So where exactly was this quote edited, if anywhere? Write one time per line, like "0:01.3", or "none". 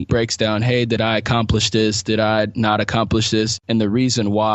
0:03.6